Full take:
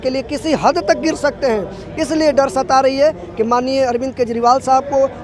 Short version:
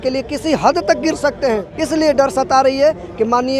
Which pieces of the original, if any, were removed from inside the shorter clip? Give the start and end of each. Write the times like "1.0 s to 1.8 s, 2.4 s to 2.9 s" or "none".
1.7 s to 1.9 s